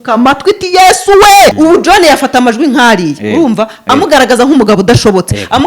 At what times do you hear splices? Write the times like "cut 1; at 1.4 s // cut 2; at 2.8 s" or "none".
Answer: cut 1; at 1.5 s